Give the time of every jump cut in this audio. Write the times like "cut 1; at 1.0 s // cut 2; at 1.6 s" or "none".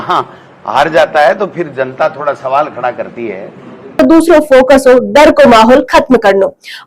cut 1; at 4.0 s